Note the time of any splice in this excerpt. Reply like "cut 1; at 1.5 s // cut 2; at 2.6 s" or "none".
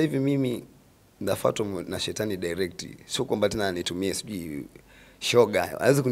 none